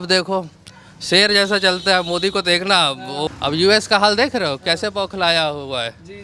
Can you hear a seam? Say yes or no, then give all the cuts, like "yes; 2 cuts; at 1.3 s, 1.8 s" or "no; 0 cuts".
yes; 1 cut; at 3.3 s